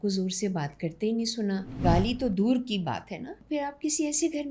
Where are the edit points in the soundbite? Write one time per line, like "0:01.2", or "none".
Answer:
0:01.8
0:03.4